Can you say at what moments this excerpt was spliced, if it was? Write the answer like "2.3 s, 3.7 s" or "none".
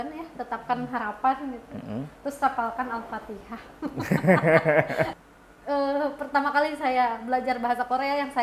5.1 s